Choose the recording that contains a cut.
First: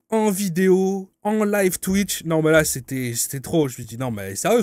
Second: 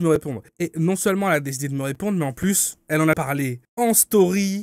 second; 1 cut; at 3.2 s

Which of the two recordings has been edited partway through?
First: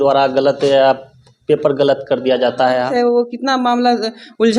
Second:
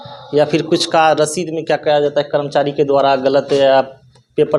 first; 1 cut; at 2.9 s

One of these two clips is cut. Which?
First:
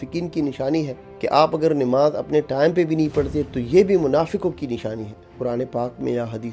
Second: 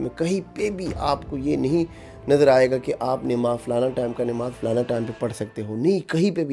first; 2 cuts; at 1.0 s, 5.3 s

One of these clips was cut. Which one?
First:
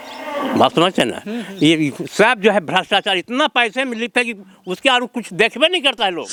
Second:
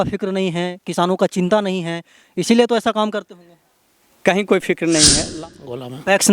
second; 1 cut; at 5.2 s

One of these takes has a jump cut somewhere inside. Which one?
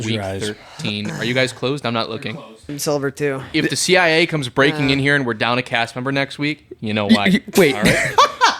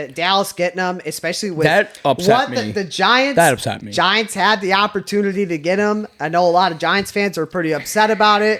first; 1 cut; at 2.7 s

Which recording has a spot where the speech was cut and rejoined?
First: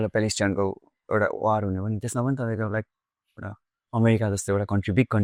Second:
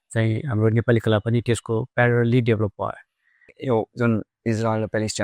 second; 1 cut; at 3.5 s

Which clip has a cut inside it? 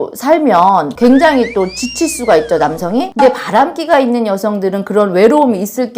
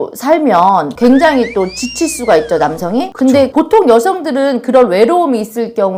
first; 1 cut; at 3.1 s

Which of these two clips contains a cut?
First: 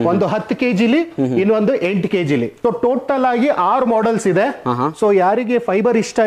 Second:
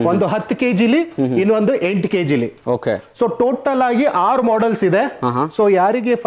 first; 1 cut; at 2.5 s

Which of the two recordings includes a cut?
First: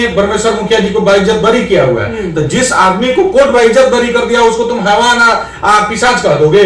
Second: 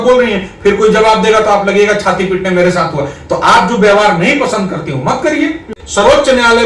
second; 1 cut; at 5.8 s

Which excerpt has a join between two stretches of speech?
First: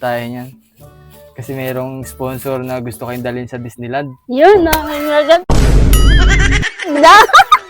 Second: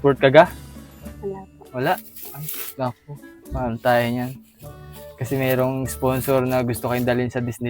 first; 2 cuts; at 5.4 s, 6.9 s

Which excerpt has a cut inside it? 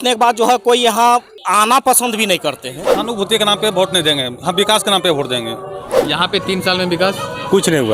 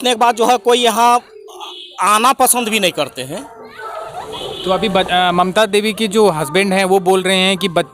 first; 3 cuts; at 1.4 s, 2.9 s, 5.9 s

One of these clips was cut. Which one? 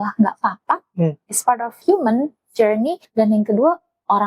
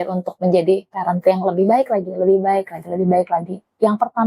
first; 2 cuts; at 1.8 s, 3.0 s

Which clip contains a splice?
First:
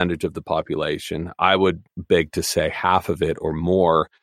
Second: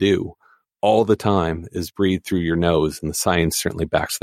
first; 1 cut; at 1.9 s

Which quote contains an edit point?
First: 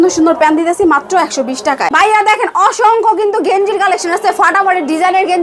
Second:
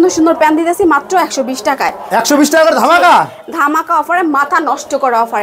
first; 1 cut; at 1.9 s

